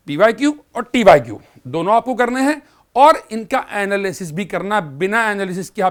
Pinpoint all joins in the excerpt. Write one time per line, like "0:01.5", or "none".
none